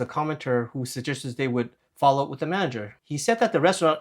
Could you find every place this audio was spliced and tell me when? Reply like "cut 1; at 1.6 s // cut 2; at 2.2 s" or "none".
cut 1; at 3.0 s